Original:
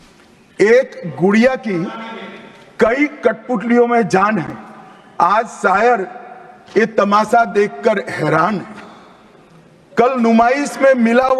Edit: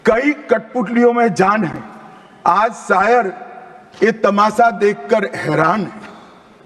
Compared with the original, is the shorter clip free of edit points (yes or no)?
yes